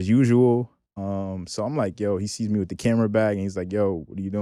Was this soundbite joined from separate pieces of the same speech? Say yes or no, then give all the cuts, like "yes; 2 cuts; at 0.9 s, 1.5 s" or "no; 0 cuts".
no; 0 cuts